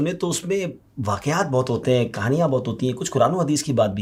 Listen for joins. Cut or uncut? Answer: uncut